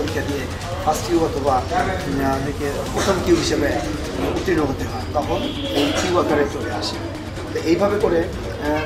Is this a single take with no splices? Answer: yes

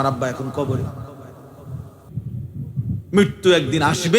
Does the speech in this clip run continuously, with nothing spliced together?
no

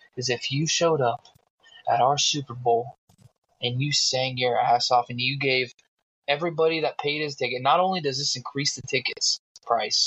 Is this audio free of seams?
yes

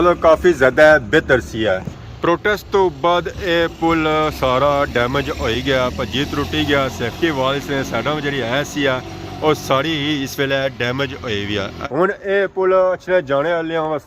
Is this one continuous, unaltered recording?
no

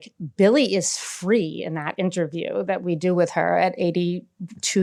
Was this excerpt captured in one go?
yes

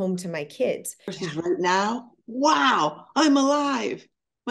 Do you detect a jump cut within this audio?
yes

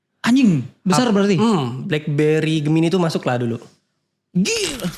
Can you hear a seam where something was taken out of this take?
no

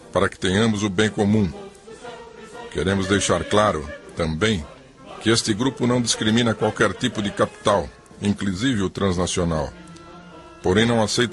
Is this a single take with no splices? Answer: yes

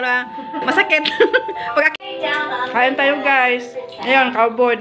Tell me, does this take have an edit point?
yes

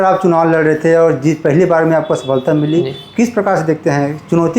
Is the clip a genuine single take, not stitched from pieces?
yes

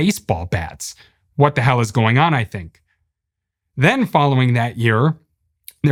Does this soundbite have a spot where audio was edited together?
no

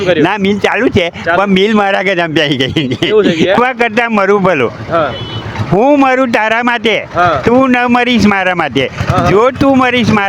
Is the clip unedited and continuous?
no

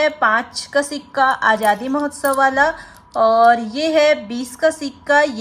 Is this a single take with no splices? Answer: yes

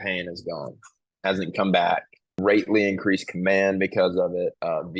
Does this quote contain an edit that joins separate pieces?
yes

